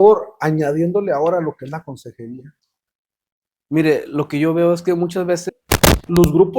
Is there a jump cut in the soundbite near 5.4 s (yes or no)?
yes